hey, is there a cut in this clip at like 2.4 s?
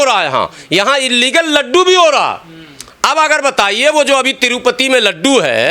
no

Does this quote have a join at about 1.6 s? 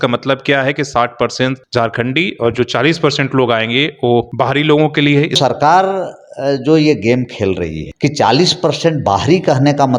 yes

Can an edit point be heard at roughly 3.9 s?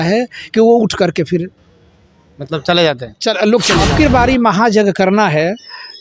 yes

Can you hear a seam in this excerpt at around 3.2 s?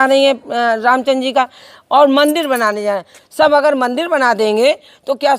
yes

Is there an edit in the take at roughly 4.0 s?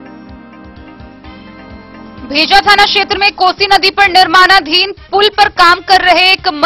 no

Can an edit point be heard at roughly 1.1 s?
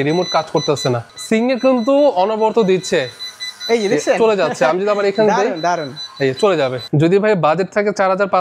yes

